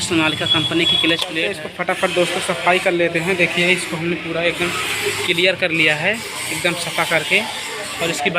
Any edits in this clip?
yes; 1 cut; at 1.6 s

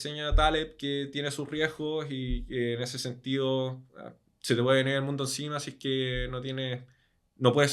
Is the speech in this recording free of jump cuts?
yes; 0 cuts

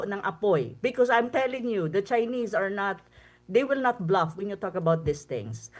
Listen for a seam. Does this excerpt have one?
no; 0 cuts

